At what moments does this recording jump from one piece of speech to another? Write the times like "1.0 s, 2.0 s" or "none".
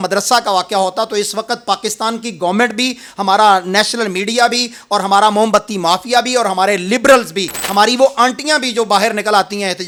none